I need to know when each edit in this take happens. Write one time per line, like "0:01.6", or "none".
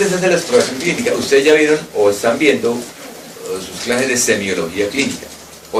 none